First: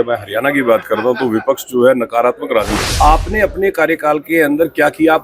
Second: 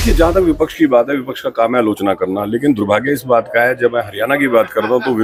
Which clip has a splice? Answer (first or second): first